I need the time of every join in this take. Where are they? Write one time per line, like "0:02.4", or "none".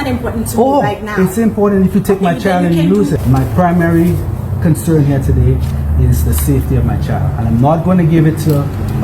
0:03.2